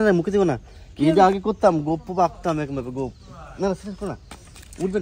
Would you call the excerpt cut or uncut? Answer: uncut